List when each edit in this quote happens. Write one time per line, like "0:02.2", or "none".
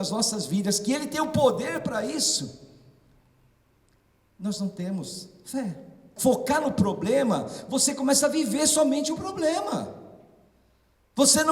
0:06.0